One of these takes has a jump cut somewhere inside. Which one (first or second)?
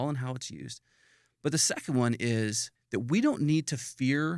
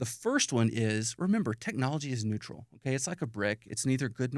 first